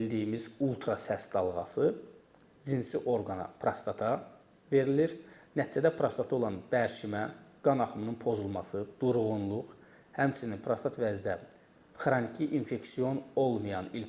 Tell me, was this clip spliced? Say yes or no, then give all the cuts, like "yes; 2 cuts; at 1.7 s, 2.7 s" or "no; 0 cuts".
no; 0 cuts